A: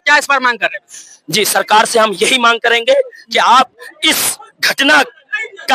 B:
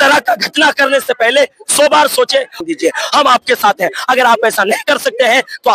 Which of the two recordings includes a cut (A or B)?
B